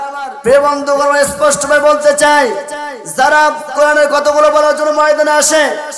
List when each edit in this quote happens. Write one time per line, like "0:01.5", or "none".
0:03.7